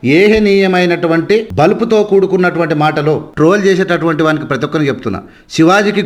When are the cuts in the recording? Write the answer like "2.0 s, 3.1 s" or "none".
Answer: 1.5 s, 3.3 s